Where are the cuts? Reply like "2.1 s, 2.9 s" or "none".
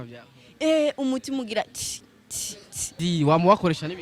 3.0 s